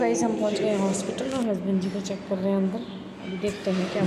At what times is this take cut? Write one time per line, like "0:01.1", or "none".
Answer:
none